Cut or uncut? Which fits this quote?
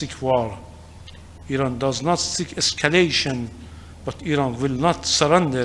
uncut